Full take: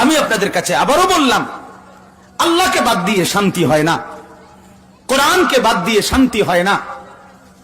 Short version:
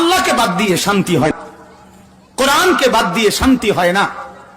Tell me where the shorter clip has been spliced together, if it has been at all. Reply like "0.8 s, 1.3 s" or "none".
1.3 s